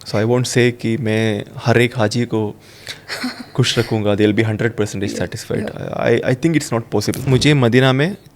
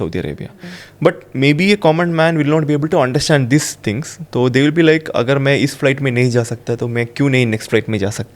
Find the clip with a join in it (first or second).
first